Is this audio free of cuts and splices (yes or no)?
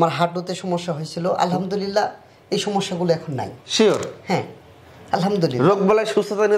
yes